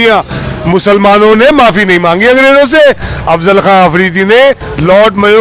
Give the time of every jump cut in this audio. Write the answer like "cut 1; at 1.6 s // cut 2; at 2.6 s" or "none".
none